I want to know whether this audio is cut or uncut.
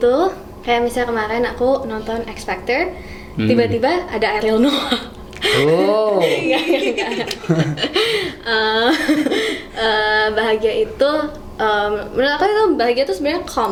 uncut